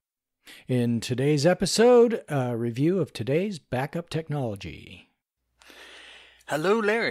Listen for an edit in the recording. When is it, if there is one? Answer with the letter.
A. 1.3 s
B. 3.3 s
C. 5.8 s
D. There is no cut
A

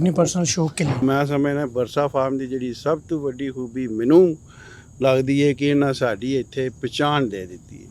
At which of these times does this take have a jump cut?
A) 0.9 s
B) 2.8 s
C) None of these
A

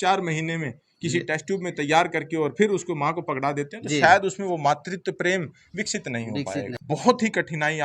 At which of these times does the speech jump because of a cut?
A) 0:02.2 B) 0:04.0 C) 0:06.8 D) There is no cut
C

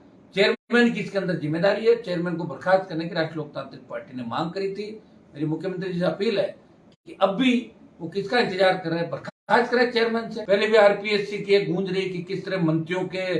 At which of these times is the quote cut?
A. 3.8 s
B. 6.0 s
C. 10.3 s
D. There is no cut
C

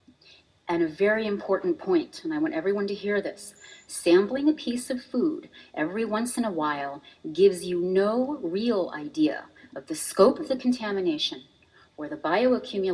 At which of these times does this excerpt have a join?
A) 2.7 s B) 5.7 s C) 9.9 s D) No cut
D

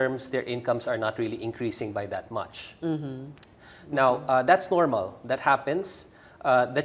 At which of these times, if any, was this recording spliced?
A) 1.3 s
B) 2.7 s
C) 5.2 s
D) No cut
D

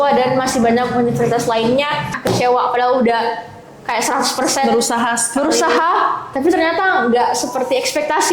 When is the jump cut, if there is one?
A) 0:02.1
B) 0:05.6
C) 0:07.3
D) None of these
A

